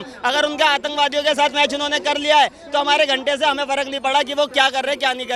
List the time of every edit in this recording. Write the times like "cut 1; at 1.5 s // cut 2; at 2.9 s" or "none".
none